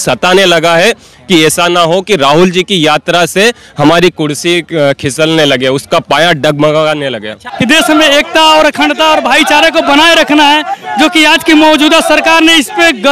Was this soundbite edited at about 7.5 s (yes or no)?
yes